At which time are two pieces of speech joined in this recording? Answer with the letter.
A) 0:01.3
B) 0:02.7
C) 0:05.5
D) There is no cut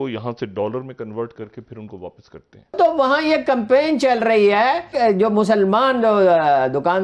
B